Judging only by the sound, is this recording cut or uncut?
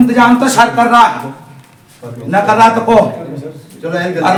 uncut